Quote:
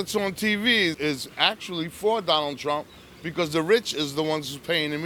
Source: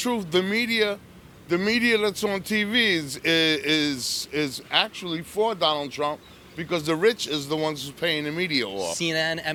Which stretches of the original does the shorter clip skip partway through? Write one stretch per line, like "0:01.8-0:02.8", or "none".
0:03.0-0:04.3